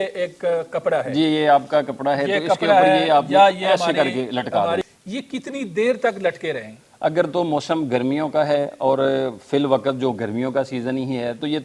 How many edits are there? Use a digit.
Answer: 1